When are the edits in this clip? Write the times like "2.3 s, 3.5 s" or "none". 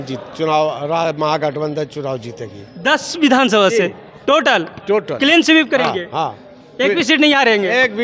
none